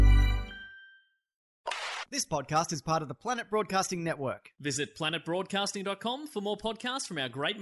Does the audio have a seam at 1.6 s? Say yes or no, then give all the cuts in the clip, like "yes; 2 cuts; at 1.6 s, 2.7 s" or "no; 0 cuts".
yes; 1 cut; at 1.6 s